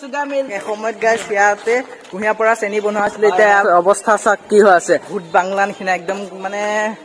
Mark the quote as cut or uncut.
cut